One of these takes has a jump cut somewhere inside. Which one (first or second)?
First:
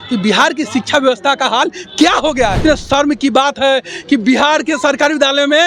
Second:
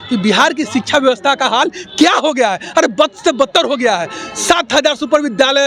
first